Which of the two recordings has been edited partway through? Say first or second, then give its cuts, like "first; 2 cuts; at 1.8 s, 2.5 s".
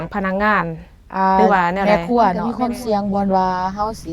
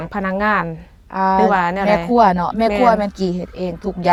first; 1 cut; at 2.5 s